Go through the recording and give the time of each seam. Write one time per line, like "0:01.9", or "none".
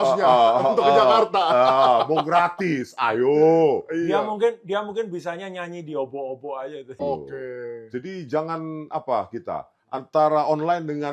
0:07.0